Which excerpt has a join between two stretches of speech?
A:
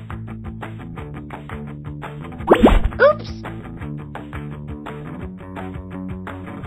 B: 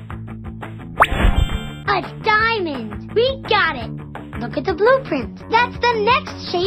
A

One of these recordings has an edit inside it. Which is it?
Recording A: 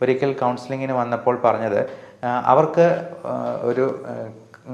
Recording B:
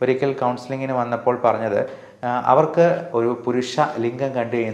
B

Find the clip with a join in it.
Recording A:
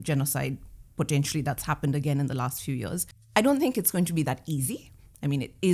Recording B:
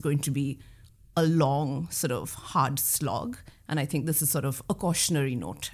A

